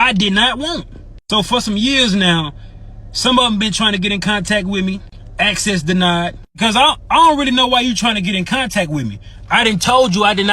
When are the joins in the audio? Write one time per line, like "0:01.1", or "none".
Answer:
0:06.4